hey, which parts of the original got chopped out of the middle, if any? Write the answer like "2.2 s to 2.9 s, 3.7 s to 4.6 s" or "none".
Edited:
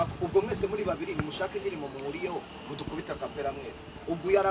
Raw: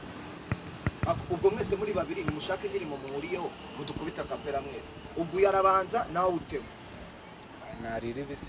none

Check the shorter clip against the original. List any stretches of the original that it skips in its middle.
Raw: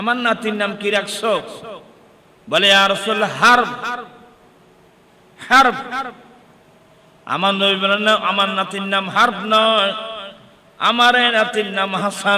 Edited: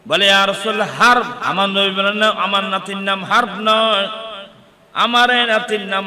3.8 s to 7.2 s

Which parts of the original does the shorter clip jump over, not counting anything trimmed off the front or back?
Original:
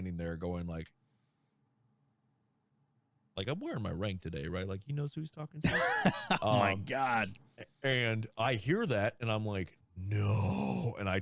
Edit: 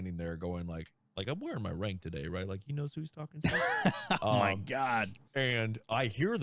1.0 s to 3.2 s, 7.4 s to 7.7 s

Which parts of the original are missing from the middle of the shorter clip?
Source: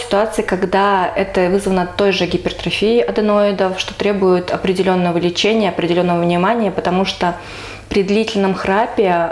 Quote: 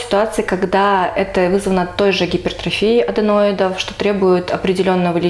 none

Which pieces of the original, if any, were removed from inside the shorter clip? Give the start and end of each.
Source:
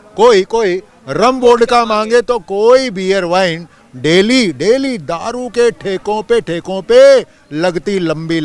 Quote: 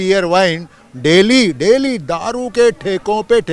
none

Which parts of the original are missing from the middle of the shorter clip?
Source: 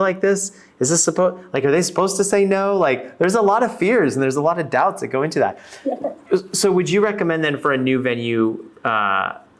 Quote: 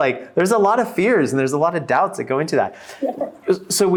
none

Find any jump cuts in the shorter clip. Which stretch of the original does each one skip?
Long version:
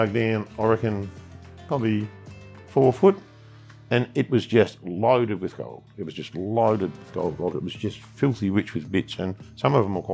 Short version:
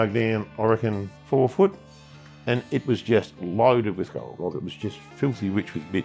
1.1 s to 2.5 s, 5.8 s to 7.4 s

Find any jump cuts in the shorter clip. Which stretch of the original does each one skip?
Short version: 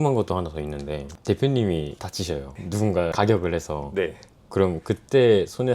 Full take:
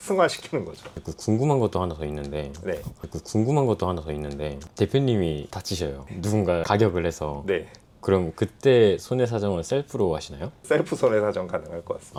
2.5 s to 4.6 s

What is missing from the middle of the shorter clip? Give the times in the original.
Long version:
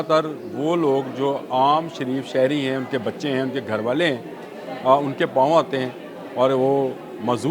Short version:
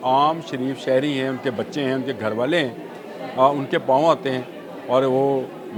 none

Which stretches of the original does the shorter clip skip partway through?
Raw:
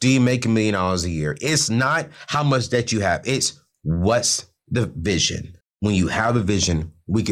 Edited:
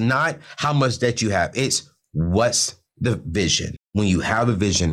5.4 s to 5.6 s

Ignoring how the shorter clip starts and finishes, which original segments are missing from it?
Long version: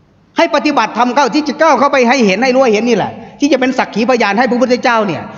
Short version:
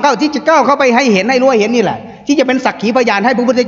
none

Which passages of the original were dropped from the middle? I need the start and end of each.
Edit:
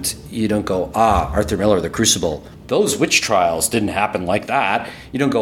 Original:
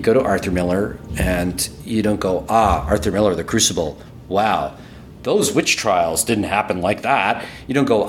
4.0 s to 5.1 s

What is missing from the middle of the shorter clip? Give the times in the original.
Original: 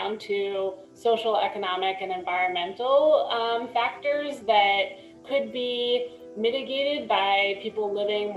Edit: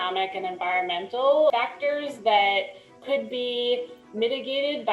3.2 s to 3.7 s

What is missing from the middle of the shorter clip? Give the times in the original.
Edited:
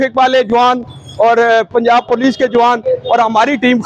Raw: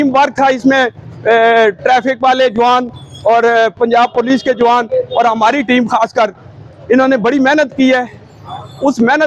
none

